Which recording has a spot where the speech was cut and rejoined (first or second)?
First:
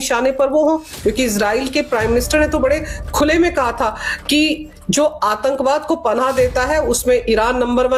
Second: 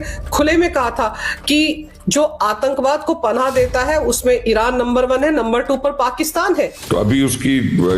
second